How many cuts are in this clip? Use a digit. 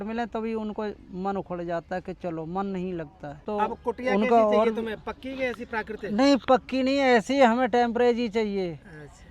1